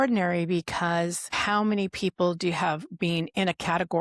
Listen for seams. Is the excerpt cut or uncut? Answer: cut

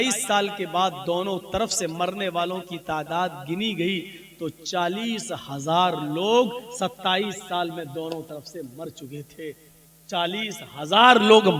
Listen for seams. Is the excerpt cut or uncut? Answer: uncut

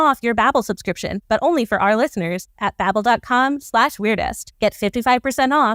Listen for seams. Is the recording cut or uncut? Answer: uncut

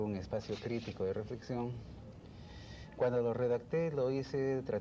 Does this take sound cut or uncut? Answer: uncut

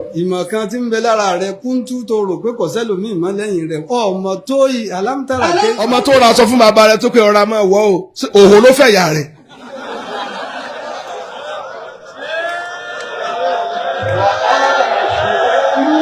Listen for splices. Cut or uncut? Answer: cut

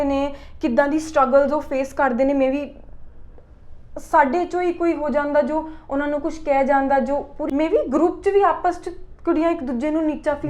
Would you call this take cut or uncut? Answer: cut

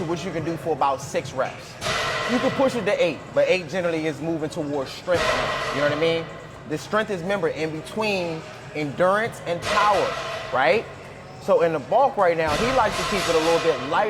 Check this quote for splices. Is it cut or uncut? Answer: uncut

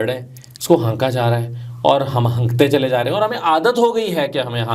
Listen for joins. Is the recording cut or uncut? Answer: uncut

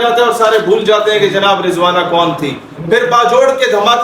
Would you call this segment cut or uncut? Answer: uncut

